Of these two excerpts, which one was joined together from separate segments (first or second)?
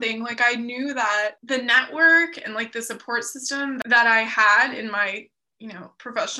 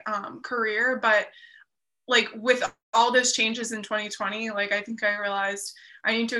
first